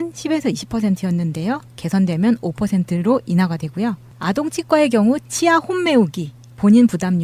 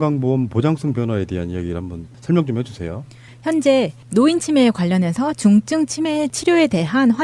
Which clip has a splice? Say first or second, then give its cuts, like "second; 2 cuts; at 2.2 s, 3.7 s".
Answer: second; 1 cut; at 1.5 s